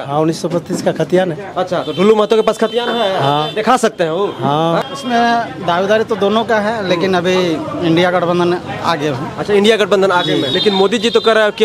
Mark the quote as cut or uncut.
cut